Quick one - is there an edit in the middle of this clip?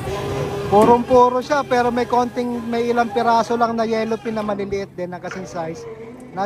no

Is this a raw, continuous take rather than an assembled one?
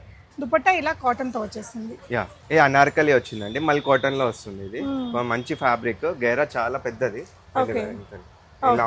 no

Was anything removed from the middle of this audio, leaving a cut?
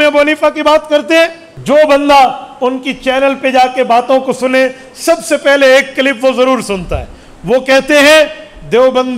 yes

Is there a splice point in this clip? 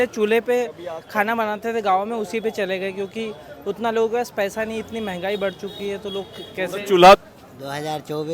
yes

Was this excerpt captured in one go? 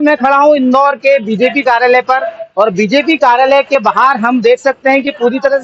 yes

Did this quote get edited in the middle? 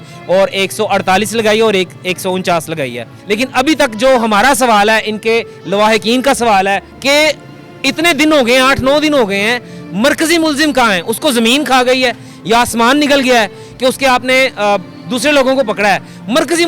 no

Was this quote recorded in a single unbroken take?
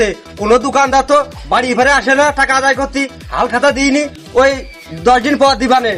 yes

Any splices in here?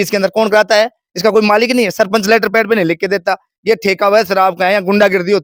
no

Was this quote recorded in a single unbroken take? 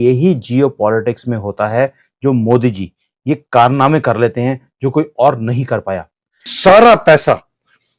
no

